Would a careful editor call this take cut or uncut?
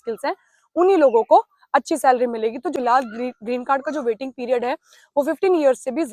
cut